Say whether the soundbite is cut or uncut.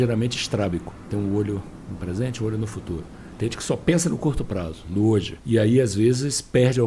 cut